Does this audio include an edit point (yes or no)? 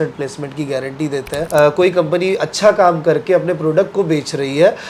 yes